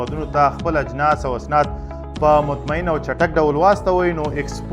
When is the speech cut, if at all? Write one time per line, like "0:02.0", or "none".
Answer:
none